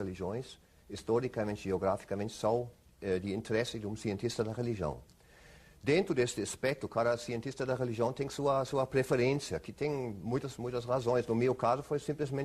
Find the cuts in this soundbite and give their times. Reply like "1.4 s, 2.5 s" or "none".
9.1 s